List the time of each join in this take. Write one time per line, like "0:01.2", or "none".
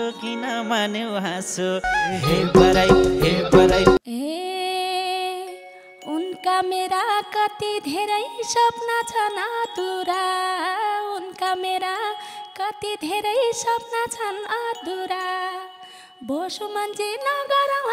0:04.0